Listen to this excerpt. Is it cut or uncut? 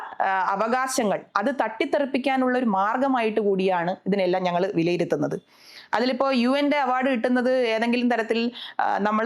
uncut